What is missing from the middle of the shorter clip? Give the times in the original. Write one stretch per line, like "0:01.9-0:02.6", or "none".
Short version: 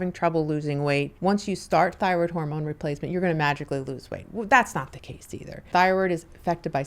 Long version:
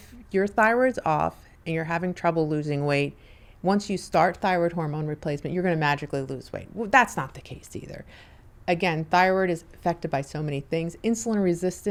0:03.1-0:03.5
0:08.1-0:09.0